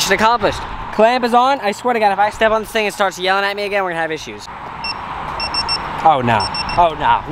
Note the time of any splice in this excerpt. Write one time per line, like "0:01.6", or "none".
none